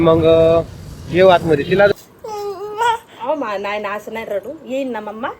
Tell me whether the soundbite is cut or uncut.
cut